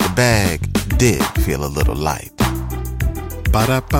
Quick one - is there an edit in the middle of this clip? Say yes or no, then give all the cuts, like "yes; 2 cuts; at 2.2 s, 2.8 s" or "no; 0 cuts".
no; 0 cuts